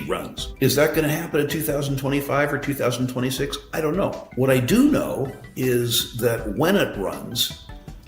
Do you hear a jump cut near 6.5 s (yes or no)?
no